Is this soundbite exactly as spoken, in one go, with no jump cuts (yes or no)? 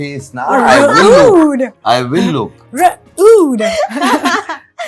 yes